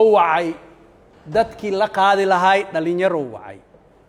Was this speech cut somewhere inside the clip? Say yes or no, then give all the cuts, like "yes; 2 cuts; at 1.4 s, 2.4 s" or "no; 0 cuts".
no; 0 cuts